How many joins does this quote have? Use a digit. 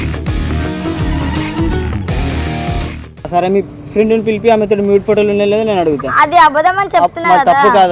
1